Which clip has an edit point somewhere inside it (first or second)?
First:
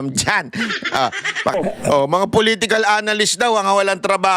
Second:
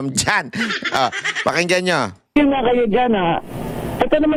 first